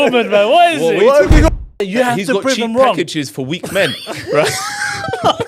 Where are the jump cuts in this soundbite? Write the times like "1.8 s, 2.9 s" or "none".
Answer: 1.5 s